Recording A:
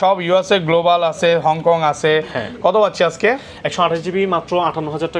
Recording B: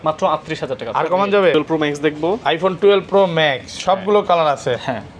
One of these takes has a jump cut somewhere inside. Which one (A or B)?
B